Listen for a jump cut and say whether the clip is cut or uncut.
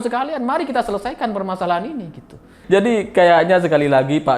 cut